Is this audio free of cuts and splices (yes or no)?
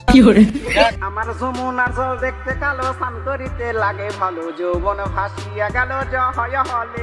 no